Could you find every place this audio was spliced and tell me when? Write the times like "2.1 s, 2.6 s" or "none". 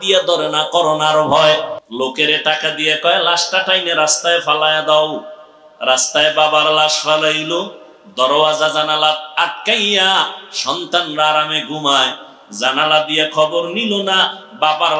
1.8 s